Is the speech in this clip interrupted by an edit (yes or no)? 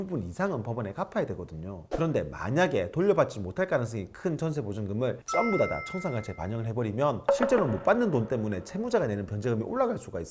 no